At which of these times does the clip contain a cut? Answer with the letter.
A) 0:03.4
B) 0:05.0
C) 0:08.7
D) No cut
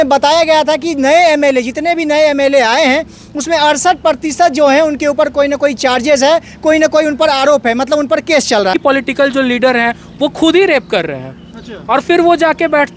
C